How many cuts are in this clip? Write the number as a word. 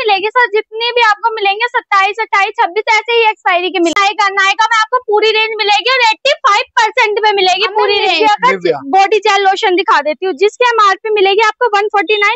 two